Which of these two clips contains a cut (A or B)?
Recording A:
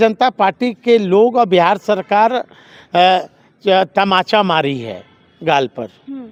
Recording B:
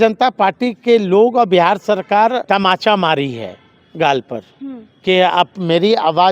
B